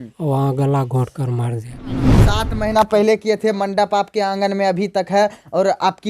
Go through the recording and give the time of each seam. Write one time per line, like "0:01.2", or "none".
0:02.2